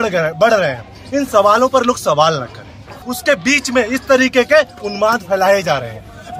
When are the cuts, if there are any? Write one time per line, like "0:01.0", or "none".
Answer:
0:02.9